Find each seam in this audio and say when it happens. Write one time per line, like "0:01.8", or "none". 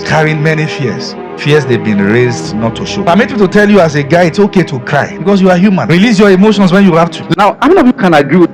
0:07.2